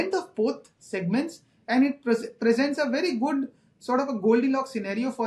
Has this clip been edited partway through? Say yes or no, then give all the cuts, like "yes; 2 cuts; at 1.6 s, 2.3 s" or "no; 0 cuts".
no; 0 cuts